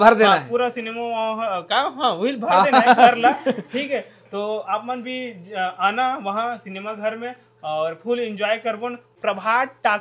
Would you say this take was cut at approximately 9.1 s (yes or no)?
yes